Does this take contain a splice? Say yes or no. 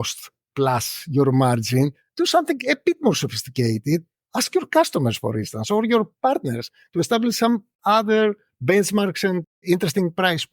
yes